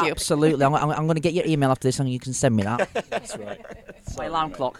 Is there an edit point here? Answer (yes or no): no